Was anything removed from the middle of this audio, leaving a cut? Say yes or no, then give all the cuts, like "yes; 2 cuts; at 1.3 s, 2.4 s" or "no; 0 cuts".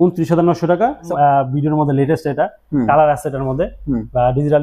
yes; 1 cut; at 1.1 s